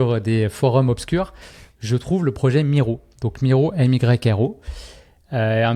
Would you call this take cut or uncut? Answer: uncut